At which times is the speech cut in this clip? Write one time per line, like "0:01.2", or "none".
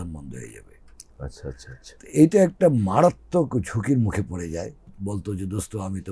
0:04.9